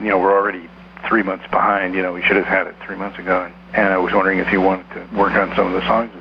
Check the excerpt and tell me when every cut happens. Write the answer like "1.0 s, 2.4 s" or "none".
3.6 s, 5.0 s